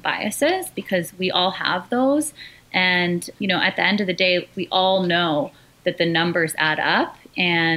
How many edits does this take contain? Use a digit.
2